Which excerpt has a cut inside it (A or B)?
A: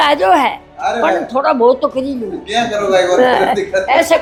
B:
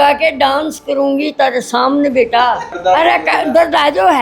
B